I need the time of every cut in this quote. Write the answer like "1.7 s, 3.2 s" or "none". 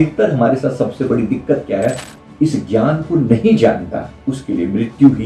2.2 s